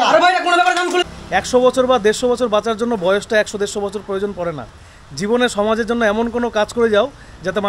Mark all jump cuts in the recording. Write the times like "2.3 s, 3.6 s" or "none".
1.0 s